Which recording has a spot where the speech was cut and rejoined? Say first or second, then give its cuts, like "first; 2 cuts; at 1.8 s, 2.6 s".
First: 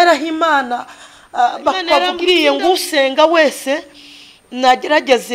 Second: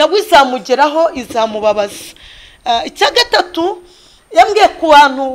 first; 1 cut; at 2.0 s